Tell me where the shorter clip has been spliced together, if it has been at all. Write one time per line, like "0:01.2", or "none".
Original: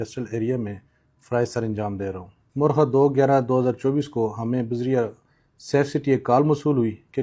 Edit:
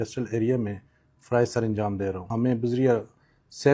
0:02.3